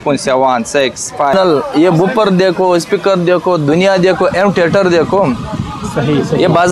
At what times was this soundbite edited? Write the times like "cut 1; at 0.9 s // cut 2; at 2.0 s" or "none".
cut 1; at 1.3 s